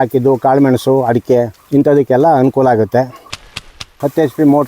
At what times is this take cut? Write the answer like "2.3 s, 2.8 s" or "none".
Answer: 1.6 s, 3.6 s